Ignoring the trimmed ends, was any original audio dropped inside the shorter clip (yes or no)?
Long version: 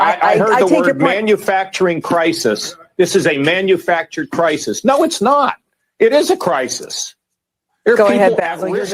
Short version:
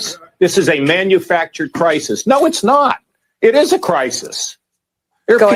no